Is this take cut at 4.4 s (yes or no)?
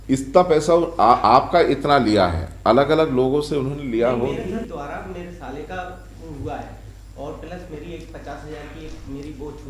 yes